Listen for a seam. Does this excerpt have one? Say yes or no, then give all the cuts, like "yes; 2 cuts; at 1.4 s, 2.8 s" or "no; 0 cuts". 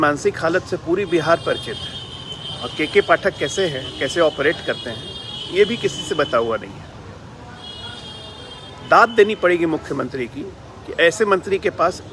no; 0 cuts